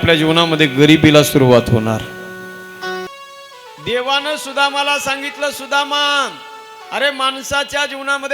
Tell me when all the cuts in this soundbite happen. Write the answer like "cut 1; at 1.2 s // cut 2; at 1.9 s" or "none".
cut 1; at 3.1 s